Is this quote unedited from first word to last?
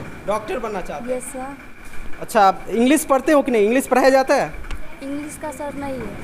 no; 1 cut; at 1.7 s

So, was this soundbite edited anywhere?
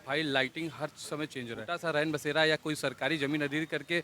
yes; 1 cut; at 1.7 s

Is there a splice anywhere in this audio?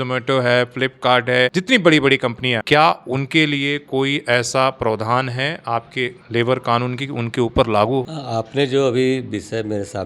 no; 0 cuts

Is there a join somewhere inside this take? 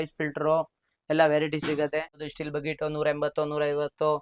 yes; 1 cut; at 2.2 s

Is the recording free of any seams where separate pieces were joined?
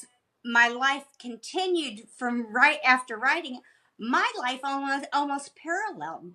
yes; 0 cuts

